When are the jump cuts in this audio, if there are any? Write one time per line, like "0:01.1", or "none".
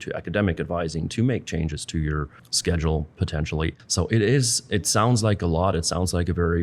0:03.8